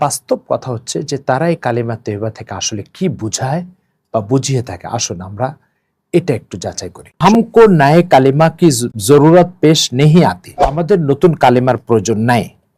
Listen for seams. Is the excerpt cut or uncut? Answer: cut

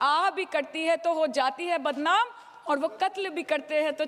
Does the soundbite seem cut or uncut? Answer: uncut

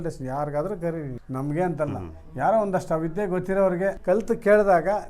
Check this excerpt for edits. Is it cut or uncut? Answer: cut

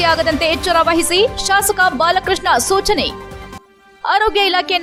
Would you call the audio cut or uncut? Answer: uncut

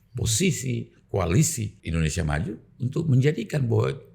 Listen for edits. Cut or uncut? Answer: cut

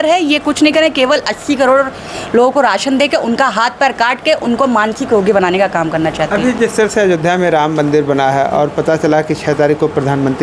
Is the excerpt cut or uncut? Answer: uncut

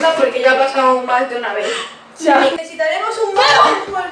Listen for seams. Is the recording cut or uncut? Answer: cut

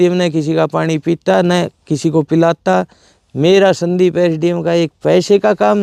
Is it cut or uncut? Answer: uncut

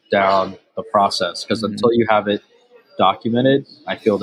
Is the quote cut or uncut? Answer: uncut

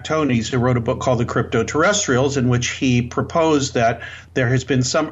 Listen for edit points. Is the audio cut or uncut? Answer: uncut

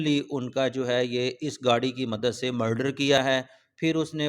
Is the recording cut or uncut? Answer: cut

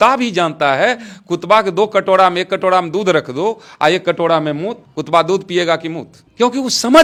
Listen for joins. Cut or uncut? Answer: uncut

